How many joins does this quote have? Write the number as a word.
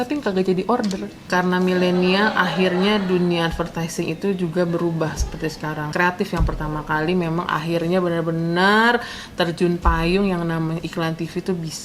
two